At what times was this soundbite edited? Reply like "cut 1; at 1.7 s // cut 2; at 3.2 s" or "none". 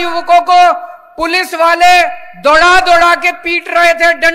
none